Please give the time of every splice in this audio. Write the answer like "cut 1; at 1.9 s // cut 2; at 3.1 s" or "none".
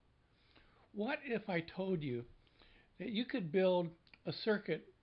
none